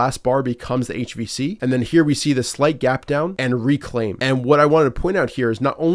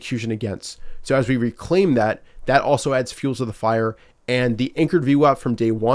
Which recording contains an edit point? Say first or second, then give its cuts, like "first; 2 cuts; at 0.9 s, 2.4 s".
first; 3 cuts; at 1.6 s, 3.4 s, 4.2 s